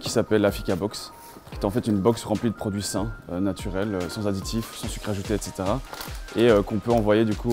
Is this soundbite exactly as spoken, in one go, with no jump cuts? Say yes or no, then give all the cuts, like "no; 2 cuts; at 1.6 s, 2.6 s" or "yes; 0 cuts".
yes; 0 cuts